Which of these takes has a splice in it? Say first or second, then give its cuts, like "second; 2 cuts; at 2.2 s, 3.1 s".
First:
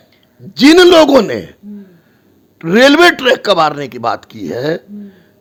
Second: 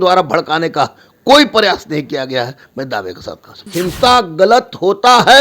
second; 1 cut; at 3.6 s